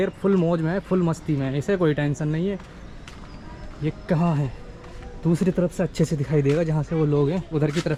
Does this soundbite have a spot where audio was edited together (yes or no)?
no